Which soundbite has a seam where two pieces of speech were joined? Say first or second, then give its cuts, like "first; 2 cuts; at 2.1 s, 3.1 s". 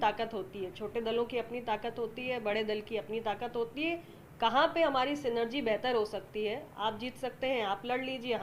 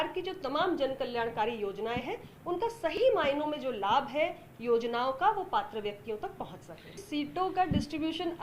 second; 1 cut; at 7.0 s